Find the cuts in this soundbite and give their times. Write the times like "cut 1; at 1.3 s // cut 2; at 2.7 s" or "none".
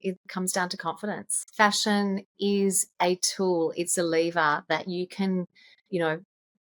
none